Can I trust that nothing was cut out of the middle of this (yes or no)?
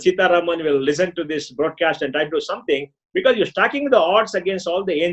yes